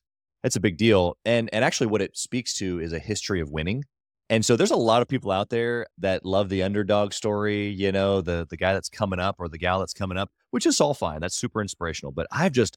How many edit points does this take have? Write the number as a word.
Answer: zero